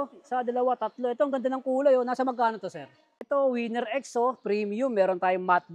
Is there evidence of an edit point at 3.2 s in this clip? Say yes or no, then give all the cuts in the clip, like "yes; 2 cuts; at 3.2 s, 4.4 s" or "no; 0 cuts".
yes; 1 cut; at 3.2 s